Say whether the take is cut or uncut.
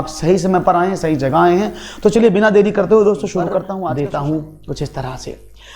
cut